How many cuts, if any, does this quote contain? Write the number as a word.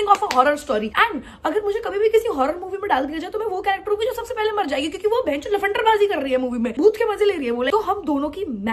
zero